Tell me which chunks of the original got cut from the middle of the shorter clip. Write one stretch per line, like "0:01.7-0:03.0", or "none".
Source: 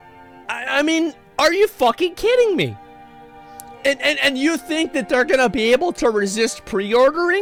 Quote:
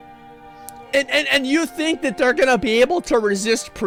none